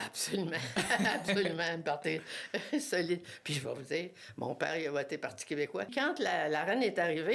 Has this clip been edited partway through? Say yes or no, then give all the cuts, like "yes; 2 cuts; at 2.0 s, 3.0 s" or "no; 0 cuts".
yes; 1 cut; at 5.9 s